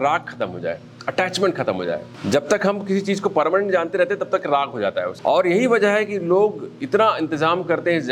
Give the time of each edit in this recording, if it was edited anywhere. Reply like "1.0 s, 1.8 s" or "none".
2.1 s, 5.1 s